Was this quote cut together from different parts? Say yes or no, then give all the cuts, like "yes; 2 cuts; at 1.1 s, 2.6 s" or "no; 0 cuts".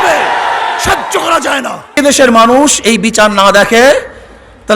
yes; 1 cut; at 2.0 s